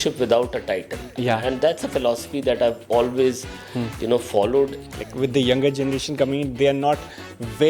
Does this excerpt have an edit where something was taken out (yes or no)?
yes